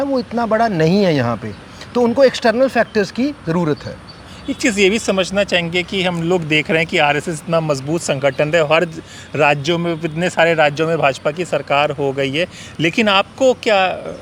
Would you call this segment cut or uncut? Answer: uncut